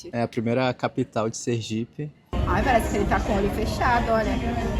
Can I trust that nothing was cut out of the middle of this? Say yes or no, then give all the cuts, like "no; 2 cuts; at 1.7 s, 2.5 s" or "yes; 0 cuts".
no; 1 cut; at 2.4 s